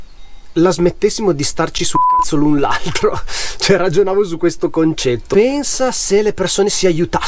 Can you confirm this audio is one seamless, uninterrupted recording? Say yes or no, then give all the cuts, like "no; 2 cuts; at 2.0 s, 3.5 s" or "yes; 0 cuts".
no; 1 cut; at 5.3 s